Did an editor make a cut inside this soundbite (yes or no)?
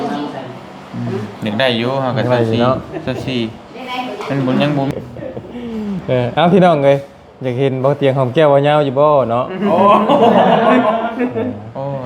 yes